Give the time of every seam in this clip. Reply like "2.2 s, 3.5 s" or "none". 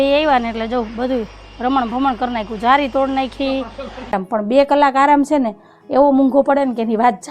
4.2 s